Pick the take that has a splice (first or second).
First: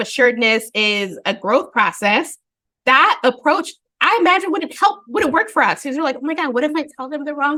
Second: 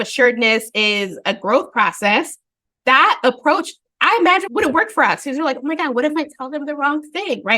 second